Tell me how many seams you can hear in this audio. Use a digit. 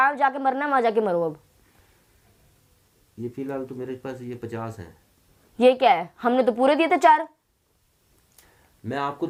0